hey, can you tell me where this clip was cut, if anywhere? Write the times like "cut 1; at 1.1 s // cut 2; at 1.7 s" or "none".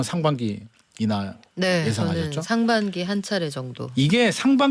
none